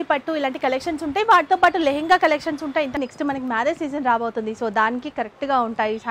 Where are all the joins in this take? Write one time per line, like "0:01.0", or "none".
0:03.0